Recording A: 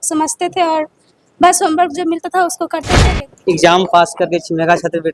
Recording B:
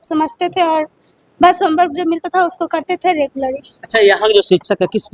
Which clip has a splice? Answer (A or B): A